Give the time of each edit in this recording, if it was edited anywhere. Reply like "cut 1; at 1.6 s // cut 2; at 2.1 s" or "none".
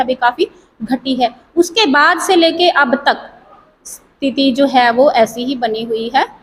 none